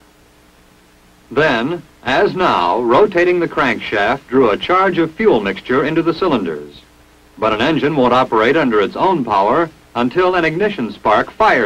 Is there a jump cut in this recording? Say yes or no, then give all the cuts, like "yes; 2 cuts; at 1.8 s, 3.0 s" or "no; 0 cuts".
no; 0 cuts